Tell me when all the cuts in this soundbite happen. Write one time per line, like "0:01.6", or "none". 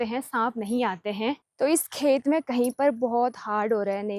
0:01.5